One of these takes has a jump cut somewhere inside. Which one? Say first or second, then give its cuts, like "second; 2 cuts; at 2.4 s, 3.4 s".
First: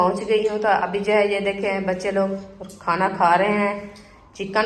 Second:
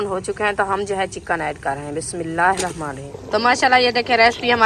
second; 1 cut; at 3.1 s